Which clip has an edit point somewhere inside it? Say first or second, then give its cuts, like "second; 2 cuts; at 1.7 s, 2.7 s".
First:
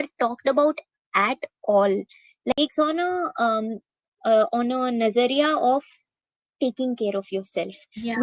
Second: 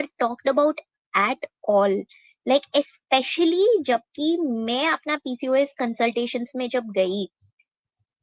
first; 1 cut; at 2.5 s